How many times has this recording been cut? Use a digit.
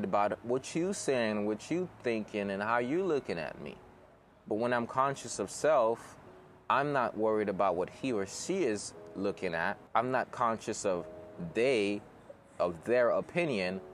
1